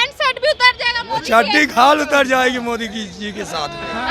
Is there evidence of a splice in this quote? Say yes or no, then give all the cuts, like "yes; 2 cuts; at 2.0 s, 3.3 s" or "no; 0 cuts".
no; 0 cuts